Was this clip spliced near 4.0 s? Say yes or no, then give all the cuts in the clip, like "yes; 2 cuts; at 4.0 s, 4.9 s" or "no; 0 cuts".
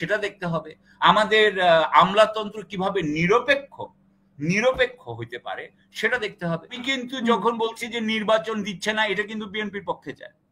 no; 1 cut; at 6.9 s